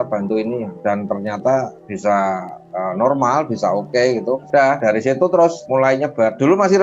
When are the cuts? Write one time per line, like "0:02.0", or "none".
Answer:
0:02.6
0:04.4